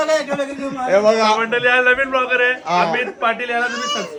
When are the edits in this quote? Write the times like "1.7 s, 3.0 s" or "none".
none